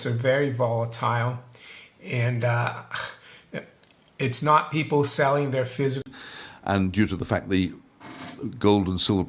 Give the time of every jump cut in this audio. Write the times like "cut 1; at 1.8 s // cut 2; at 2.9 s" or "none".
cut 1; at 6.0 s